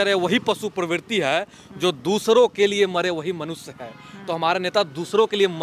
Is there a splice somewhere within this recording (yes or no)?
no